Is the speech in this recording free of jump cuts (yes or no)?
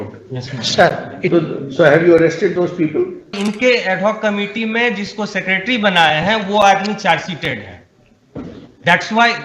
no